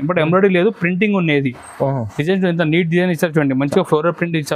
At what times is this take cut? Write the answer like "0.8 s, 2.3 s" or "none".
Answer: none